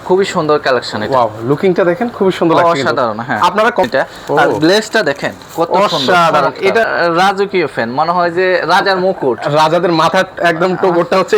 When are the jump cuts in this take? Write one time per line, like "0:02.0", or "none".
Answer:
0:03.8
0:06.9